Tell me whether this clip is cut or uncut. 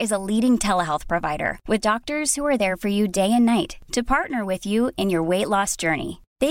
uncut